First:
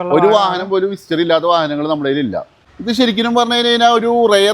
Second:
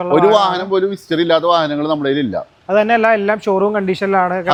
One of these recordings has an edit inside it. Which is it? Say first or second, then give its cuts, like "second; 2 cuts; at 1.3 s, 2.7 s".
first; 1 cut; at 2.6 s